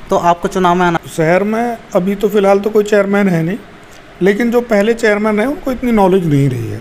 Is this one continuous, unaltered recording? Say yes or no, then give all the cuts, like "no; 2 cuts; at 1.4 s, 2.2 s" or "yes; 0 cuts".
no; 1 cut; at 1.0 s